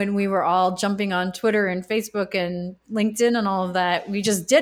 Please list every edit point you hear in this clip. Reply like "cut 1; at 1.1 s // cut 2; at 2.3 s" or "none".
none